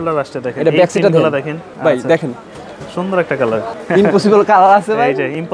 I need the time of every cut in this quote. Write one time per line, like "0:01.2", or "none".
0:01.7
0:03.7